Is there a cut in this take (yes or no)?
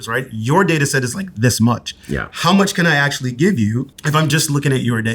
yes